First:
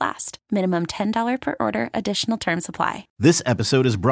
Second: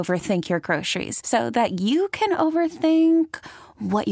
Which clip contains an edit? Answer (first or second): first